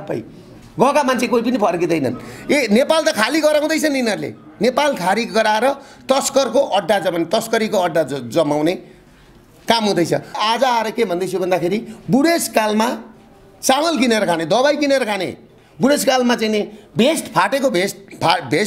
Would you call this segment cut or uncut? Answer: cut